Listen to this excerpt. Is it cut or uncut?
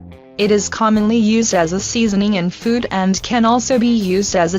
cut